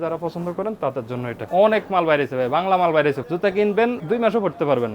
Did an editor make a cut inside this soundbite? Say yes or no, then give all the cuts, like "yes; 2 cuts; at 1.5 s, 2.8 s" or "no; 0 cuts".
yes; 3 cuts; at 1.4 s, 3.2 s, 4.0 s